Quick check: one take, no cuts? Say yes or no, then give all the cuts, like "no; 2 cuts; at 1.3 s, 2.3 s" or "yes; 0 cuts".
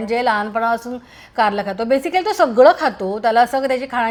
yes; 0 cuts